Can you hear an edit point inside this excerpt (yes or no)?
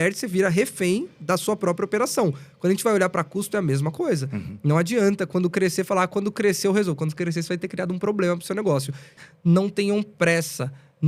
yes